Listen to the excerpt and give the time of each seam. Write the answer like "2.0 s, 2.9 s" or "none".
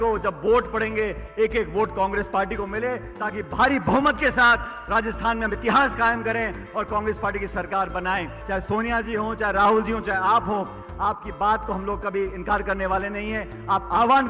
8.4 s